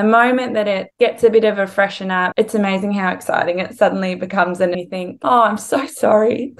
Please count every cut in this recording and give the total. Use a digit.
2